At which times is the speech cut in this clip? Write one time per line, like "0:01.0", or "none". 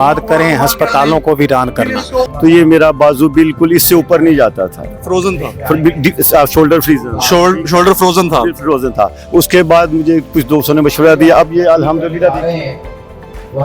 0:02.3